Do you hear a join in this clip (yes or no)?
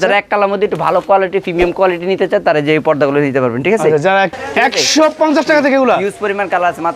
yes